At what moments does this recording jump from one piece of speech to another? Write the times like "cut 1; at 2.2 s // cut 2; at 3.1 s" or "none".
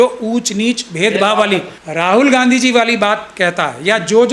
cut 1; at 1.8 s